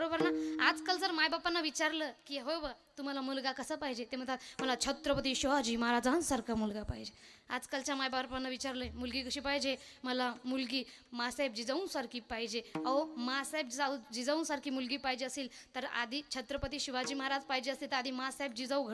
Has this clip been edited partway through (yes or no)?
no